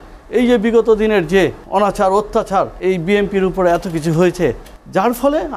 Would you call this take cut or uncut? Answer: cut